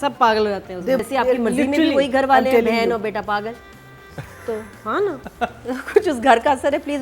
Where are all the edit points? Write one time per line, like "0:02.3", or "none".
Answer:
0:01.0